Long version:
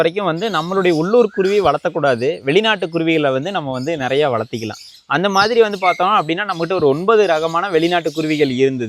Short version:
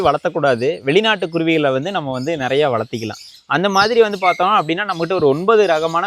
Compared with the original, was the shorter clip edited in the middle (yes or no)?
no